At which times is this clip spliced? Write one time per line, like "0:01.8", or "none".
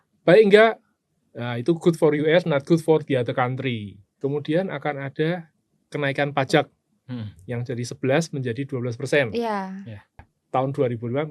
0:04.0
0:10.3